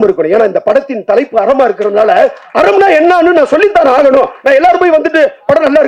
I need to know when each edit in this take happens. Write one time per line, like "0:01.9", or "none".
none